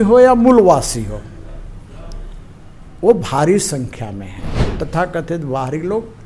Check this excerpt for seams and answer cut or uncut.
cut